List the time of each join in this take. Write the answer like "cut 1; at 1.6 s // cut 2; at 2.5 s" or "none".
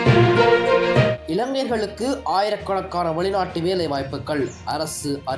cut 1; at 1.2 s